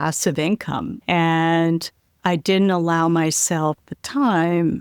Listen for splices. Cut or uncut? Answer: cut